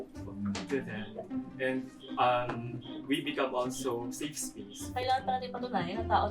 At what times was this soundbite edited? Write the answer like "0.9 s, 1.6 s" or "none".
4.8 s